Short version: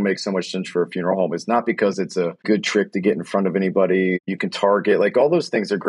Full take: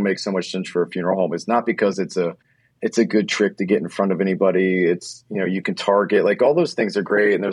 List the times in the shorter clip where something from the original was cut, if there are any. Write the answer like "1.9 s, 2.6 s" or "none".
2.4 s, 4.2 s